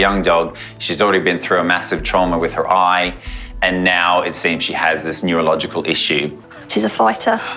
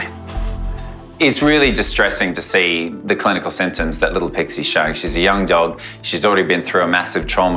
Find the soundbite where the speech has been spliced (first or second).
first